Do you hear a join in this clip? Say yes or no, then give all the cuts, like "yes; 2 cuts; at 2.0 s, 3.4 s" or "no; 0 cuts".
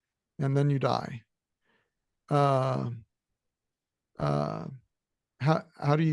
no; 0 cuts